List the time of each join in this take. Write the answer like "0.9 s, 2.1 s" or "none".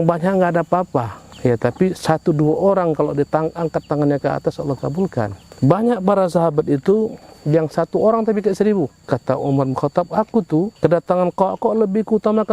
1.2 s, 5.4 s, 9.0 s, 10.7 s